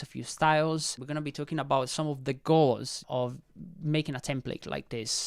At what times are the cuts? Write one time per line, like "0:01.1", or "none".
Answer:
0:01.0
0:03.0

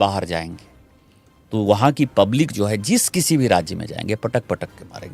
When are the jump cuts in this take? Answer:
none

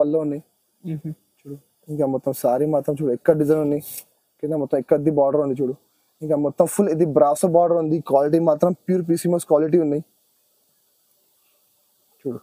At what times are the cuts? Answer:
none

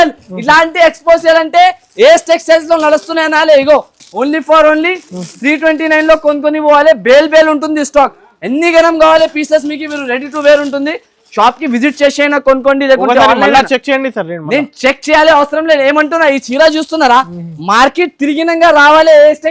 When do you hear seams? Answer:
none

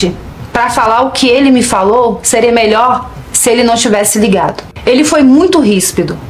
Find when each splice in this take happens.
none

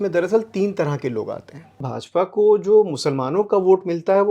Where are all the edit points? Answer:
0:01.9

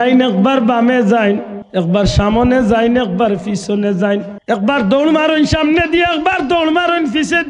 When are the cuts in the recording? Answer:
0:01.6
0:04.3

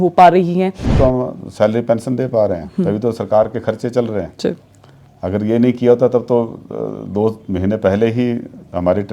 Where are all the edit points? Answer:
0:00.9

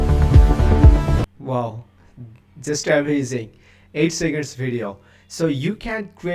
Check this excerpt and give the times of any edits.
0:01.4

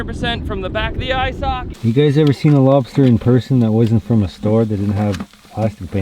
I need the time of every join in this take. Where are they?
0:01.7

